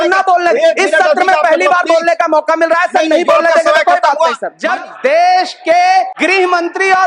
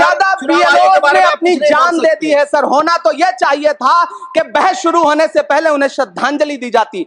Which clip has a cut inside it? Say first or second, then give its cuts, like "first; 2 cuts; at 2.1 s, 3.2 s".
first; 2 cuts; at 4.5 s, 6.1 s